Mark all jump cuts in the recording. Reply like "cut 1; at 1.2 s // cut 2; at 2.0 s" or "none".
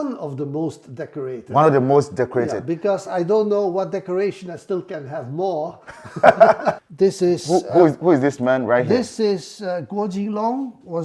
cut 1; at 6.9 s